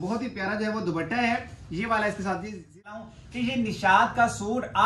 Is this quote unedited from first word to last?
no; 1 cut; at 3.0 s

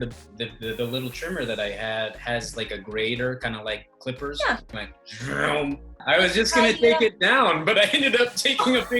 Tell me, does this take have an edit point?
yes; 2 cuts; at 4.8 s, 5.9 s

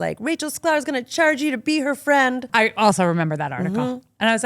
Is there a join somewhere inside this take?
yes; 1 cut; at 2.5 s

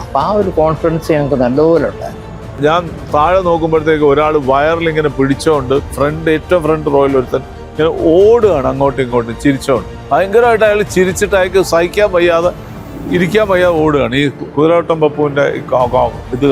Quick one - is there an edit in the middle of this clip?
yes; 3 cuts; at 2.6 s, 5.9 s, 9.9 s

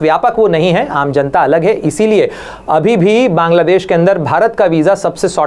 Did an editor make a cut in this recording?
no; 0 cuts

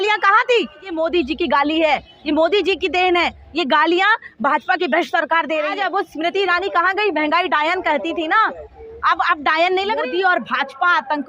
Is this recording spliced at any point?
yes; 3 cuts; at 1.0 s, 5.7 s, 10.0 s

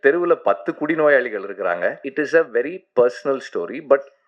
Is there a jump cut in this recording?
yes; 1 cut; at 2.0 s

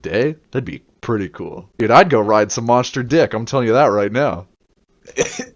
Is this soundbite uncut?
no; 1 cut; at 1.6 s

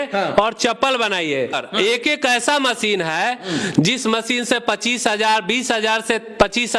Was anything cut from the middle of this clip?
yes; 1 cut; at 1.6 s

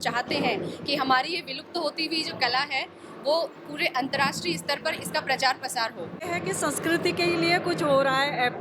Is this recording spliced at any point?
yes; 1 cut; at 6.2 s

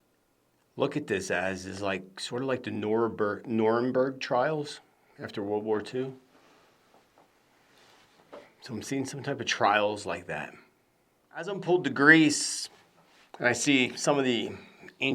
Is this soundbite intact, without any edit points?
no; 1 cut; at 11.6 s

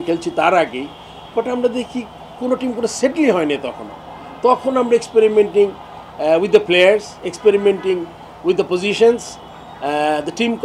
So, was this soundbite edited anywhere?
no; 0 cuts

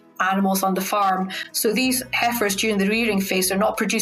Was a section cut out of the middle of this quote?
no; 0 cuts

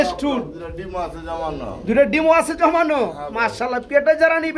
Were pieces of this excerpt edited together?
no; 0 cuts

